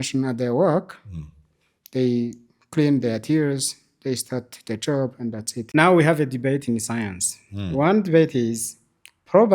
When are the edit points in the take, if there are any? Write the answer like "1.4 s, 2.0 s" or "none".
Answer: 5.6 s

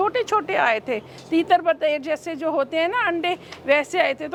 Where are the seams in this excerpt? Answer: none

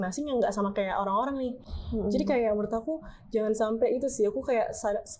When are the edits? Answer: none

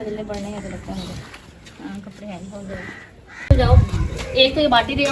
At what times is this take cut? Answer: 3.5 s

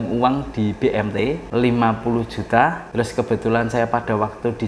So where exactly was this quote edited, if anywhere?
1.4 s, 2.8 s

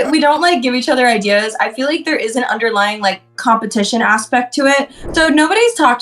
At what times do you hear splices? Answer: 5.0 s

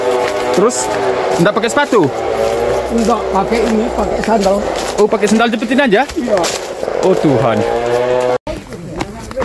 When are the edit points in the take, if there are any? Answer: 8.4 s

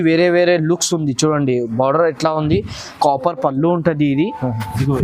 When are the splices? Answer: 2.9 s

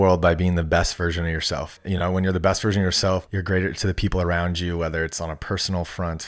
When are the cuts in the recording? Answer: 1.8 s, 3.3 s

